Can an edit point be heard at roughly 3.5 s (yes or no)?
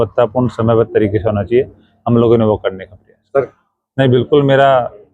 yes